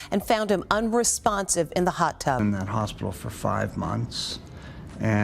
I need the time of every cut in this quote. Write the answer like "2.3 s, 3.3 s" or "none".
2.4 s